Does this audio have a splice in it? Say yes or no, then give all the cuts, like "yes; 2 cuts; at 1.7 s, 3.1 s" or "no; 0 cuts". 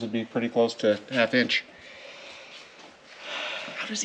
no; 0 cuts